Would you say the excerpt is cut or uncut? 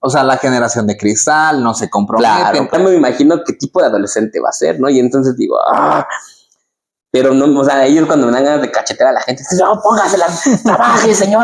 cut